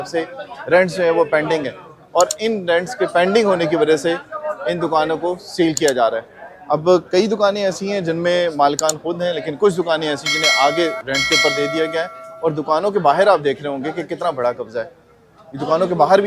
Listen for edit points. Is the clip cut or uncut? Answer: uncut